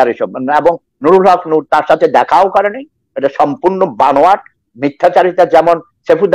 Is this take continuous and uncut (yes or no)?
yes